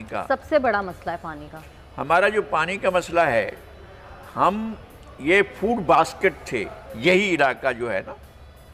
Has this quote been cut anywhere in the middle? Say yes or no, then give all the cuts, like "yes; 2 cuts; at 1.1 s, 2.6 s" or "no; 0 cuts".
no; 0 cuts